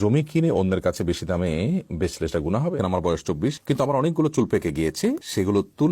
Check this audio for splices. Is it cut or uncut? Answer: cut